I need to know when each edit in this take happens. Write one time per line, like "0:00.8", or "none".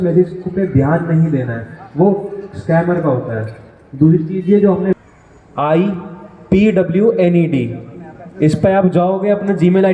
0:05.0